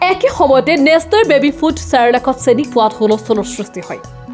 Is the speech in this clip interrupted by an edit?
no; 0 cuts

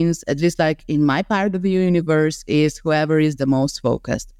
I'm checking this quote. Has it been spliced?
no; 0 cuts

